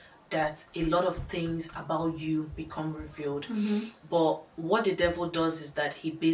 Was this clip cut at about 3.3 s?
no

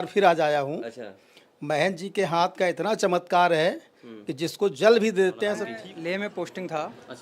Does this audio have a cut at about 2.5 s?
no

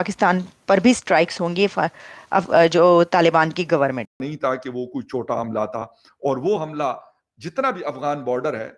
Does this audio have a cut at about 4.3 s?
yes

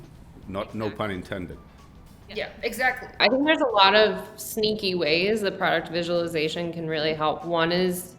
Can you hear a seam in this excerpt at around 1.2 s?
no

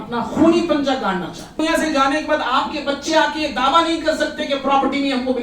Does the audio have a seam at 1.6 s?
yes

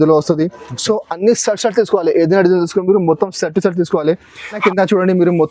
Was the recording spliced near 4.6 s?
yes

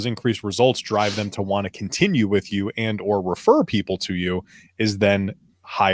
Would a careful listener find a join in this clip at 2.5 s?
no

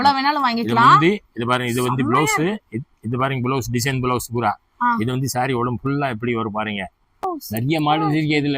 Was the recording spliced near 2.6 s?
no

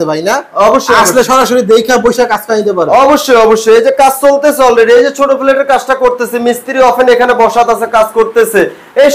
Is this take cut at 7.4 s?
no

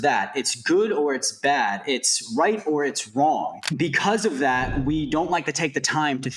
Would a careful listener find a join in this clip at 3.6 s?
yes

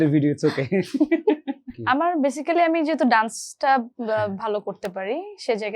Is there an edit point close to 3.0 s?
no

